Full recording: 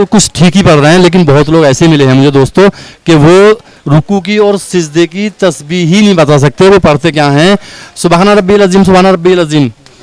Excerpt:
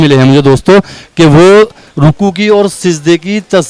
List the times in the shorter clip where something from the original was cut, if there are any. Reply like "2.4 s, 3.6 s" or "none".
none